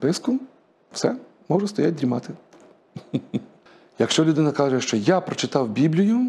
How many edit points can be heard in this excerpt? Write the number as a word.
one